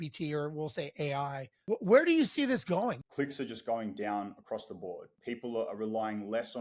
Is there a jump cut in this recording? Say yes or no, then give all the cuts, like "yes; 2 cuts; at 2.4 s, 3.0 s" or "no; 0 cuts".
yes; 3 cuts; at 1.5 s, 3.0 s, 5.1 s